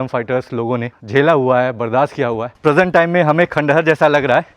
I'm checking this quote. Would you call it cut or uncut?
cut